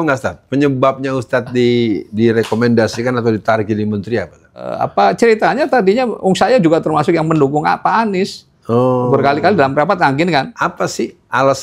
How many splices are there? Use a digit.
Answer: 2